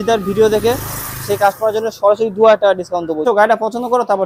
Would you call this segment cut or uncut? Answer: cut